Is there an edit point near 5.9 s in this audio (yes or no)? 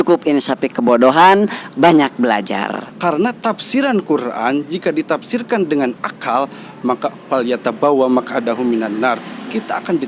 no